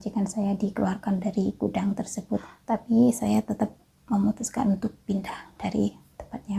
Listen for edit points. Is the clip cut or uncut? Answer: cut